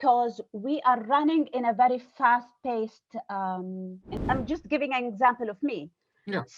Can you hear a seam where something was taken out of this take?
yes; 1 cut; at 4.2 s

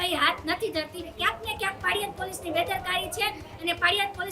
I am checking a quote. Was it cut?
yes; 1 cut; at 1.1 s

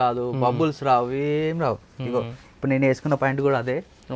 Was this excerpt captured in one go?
yes; 0 cuts

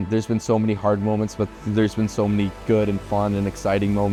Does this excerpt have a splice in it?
no; 0 cuts

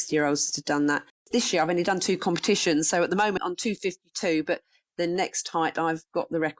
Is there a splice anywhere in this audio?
yes; 2 cuts; at 1.1 s, 3.4 s

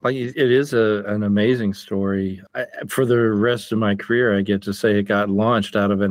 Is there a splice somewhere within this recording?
yes; 1 cut; at 2.4 s

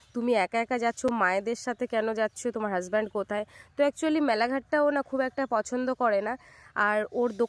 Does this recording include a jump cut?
no; 0 cuts

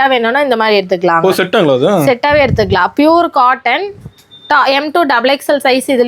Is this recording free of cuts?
yes; 0 cuts

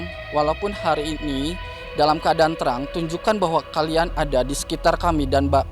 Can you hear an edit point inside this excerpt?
no; 0 cuts

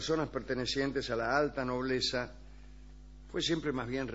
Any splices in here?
yes; 1 cut; at 3.1 s

